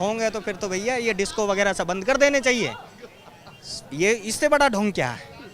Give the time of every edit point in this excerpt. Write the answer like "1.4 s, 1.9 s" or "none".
none